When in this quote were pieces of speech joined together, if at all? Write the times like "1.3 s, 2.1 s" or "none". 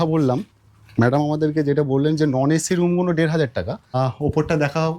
4.0 s